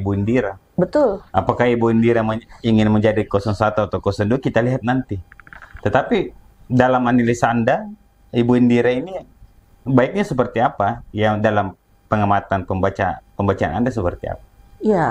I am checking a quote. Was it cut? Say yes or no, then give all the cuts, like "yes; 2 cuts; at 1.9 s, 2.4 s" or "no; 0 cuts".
no; 0 cuts